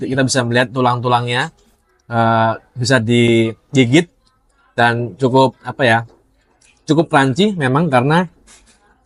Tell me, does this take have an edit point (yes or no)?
no